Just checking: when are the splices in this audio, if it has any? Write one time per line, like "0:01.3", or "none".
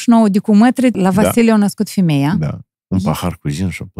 0:00.9
0:02.7